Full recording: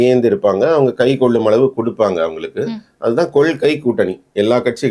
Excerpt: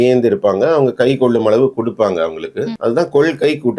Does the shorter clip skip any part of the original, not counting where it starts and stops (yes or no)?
yes